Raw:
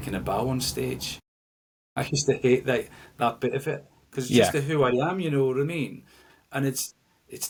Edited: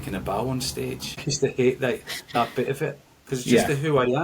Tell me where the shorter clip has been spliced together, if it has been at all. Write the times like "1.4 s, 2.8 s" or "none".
1.2 s